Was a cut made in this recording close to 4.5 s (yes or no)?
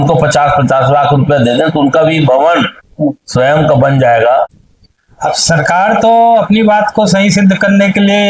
no